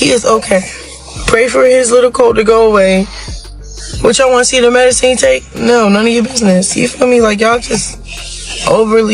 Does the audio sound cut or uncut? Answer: uncut